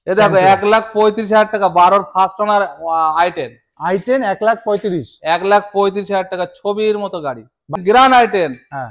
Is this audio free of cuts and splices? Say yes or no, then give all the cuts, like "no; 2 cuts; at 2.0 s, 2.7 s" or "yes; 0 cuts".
no; 1 cut; at 7.7 s